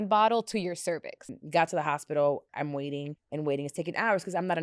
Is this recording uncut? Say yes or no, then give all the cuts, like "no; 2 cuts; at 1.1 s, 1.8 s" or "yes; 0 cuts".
no; 2 cuts; at 1.2 s, 2.7 s